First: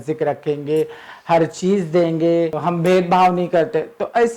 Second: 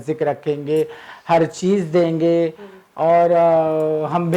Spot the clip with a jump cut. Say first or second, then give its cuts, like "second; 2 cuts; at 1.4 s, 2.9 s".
first; 1 cut; at 2.6 s